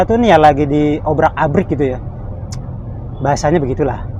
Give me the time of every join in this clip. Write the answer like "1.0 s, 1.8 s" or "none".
none